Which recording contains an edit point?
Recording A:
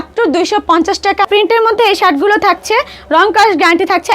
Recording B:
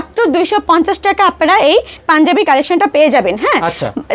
A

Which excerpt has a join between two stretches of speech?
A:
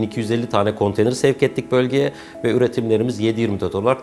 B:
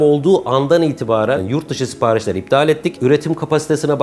B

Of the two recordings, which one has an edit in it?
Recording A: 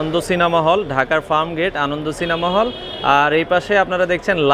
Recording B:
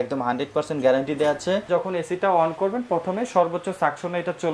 B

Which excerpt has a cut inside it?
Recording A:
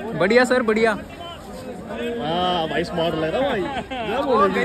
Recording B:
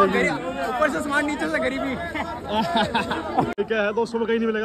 B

